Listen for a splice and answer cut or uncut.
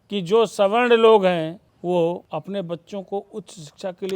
cut